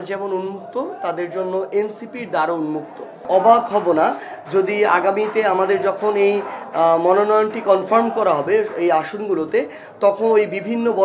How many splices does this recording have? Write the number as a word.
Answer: one